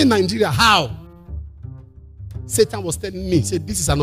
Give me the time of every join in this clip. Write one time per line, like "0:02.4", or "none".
0:00.9
0:02.5